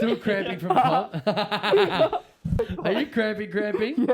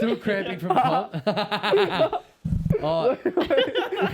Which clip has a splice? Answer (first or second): first